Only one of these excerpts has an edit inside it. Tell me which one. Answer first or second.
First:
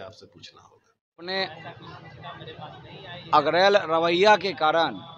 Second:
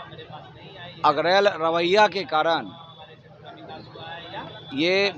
first